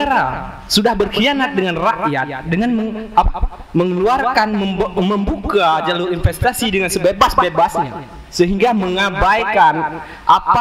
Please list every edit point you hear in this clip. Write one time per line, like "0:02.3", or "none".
none